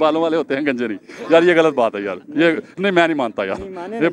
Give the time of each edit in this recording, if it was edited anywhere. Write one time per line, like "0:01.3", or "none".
none